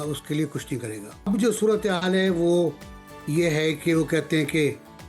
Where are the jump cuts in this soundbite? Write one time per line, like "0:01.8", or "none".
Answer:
0:01.3